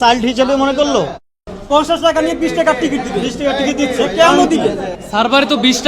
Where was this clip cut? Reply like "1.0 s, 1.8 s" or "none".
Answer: 1.3 s, 4.9 s